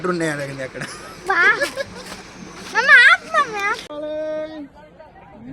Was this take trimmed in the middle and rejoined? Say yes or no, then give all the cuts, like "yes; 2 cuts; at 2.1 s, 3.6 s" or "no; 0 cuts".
yes; 1 cut; at 3.9 s